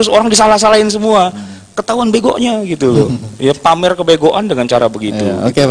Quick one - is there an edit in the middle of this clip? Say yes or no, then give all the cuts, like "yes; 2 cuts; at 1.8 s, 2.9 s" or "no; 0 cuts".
no; 0 cuts